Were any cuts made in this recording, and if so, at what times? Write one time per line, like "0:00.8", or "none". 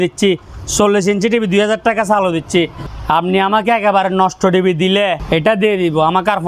0:02.9
0:05.2